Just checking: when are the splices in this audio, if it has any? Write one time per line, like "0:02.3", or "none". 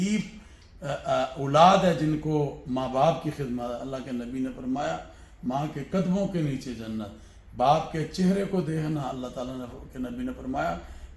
none